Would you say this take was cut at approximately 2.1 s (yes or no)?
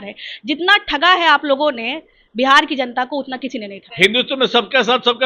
no